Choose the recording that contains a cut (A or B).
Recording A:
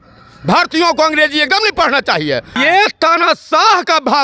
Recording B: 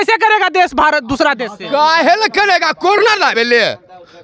A